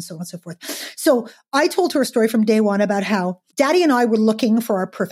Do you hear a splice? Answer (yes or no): yes